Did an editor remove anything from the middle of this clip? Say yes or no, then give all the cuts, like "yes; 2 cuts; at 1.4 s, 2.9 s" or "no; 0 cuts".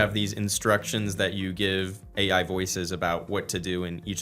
yes; 1 cut; at 2.1 s